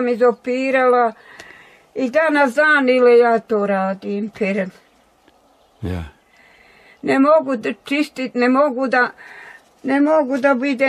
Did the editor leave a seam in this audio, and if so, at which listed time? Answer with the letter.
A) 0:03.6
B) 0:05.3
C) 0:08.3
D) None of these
D